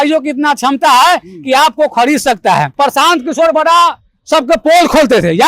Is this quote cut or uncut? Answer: cut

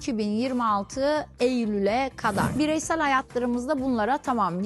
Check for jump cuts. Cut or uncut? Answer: cut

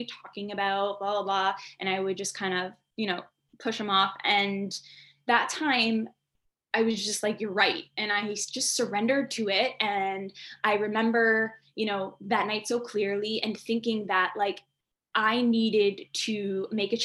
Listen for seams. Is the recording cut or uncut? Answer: uncut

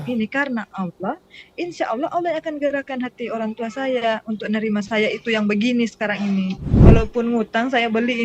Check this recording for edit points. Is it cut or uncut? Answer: cut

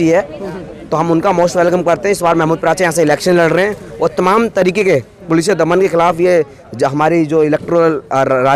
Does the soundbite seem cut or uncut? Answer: uncut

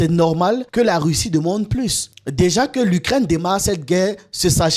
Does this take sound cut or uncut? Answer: cut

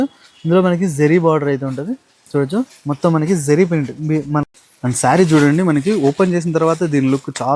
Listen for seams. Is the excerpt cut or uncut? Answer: cut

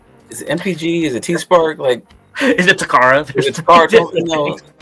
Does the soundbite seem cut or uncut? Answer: uncut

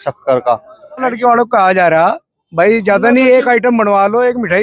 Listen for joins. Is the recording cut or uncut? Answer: cut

